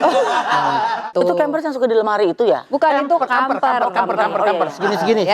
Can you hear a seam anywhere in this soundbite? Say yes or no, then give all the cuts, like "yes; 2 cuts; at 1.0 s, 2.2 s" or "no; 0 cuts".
yes; 1 cut; at 1.1 s